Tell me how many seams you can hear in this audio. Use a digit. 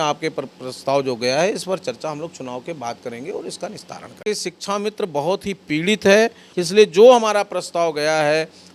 2